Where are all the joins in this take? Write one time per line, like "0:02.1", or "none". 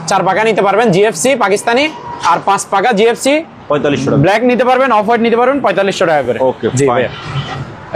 none